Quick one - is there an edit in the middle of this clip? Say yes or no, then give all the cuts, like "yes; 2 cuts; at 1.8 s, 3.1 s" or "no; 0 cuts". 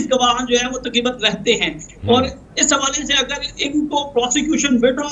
no; 0 cuts